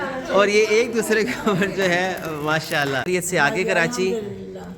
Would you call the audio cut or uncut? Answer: cut